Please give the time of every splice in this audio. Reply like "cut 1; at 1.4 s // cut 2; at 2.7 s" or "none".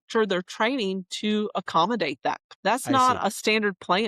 cut 1; at 2.5 s